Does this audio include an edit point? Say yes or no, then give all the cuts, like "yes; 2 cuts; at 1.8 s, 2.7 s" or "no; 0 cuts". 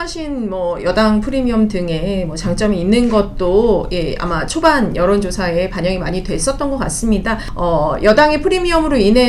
yes; 1 cut; at 7.4 s